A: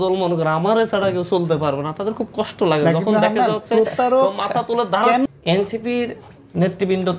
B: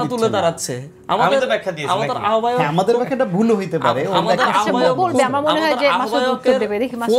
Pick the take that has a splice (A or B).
A